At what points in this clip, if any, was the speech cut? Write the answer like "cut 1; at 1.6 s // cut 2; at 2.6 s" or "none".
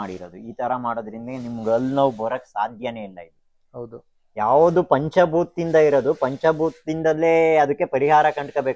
none